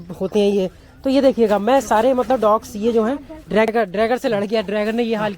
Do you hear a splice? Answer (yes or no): yes